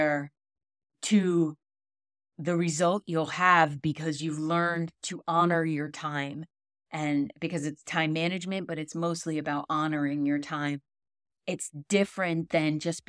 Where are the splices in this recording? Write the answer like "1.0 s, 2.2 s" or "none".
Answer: none